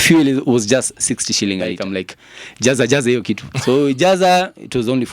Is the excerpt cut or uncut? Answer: cut